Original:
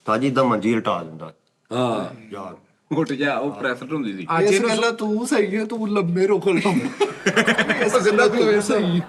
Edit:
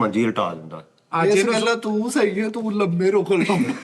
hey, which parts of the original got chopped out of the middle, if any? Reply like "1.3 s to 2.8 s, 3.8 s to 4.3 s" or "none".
1.5 s to 4.2 s